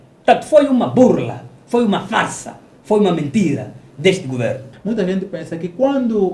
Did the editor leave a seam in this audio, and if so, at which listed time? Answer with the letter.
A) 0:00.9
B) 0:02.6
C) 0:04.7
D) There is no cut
C